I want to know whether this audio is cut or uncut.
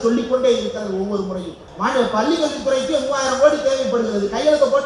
cut